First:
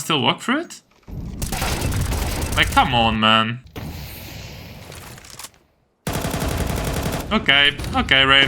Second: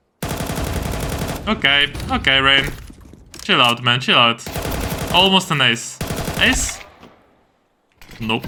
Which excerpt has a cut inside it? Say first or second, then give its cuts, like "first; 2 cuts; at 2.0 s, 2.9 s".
first; 1 cut; at 3.6 s